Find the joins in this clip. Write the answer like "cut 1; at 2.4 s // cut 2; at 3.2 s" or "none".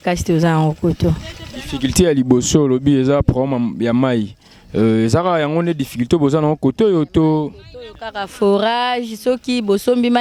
none